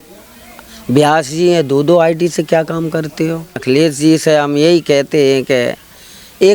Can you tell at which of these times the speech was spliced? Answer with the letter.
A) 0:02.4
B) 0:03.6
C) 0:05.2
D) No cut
B